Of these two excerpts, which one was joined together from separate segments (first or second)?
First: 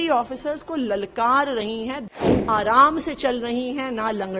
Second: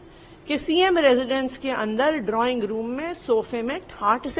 first